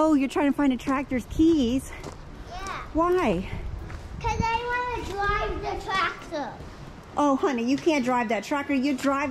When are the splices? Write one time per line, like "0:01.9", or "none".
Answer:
none